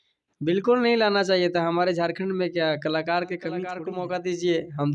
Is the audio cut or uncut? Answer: cut